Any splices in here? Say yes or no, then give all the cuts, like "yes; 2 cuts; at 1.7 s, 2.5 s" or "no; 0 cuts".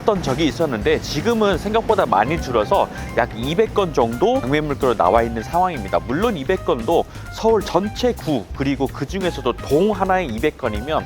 no; 0 cuts